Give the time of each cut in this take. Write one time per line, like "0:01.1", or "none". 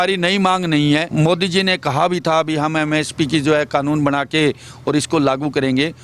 0:01.1